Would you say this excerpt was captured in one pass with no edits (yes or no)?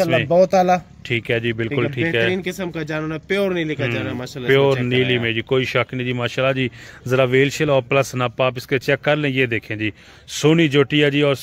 yes